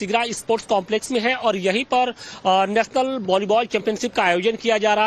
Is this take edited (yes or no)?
no